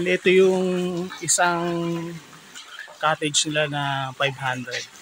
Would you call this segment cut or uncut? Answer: uncut